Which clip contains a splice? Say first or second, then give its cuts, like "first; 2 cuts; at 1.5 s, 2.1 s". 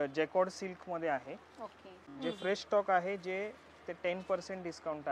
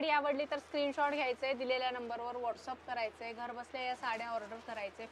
first; 1 cut; at 2.1 s